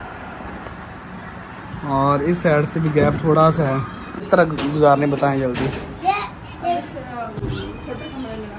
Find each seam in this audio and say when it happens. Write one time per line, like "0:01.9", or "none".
0:04.3